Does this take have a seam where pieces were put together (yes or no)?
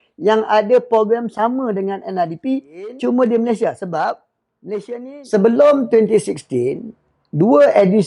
yes